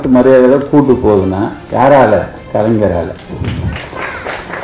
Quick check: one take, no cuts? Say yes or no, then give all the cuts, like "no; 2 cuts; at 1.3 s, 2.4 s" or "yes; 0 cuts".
yes; 0 cuts